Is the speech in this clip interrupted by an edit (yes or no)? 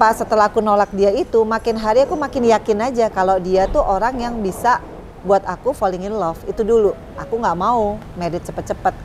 yes